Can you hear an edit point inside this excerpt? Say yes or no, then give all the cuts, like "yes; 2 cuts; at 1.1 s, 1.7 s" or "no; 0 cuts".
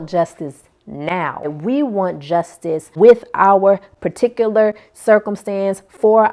yes; 2 cuts; at 1.5 s, 2.9 s